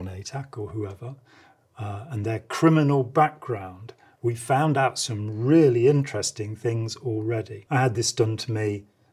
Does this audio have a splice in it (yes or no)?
no